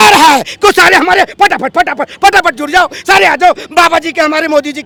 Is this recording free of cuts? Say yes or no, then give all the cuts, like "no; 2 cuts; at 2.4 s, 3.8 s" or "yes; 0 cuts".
yes; 0 cuts